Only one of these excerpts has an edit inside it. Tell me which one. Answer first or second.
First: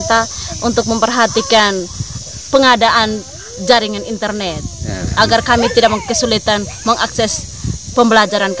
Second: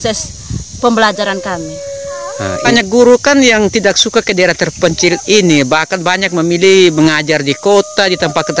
second